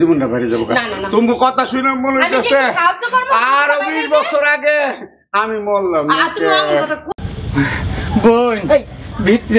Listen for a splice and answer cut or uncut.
cut